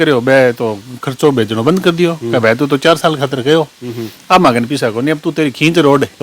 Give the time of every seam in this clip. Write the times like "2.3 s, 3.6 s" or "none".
none